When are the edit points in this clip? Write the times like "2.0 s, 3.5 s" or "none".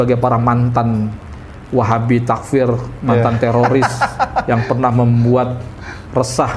none

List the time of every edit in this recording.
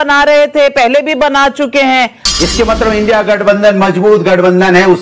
2.2 s

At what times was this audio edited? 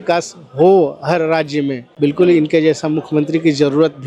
none

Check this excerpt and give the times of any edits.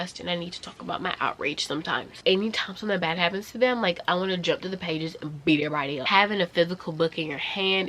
2.2 s, 6.0 s

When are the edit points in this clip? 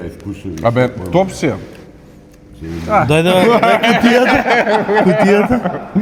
none

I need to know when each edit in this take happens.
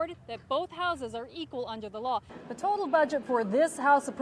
2.3 s

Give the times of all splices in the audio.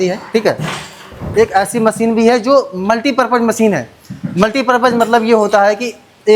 1.2 s

